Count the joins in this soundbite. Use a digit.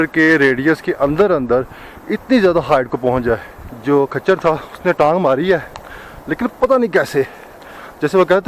1